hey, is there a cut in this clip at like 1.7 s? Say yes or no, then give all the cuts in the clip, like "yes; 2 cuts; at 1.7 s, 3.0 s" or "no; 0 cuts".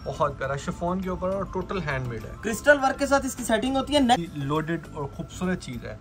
no; 1 cut; at 4.2 s